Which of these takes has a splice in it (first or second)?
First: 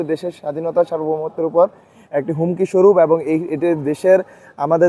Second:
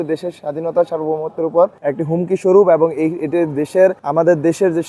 second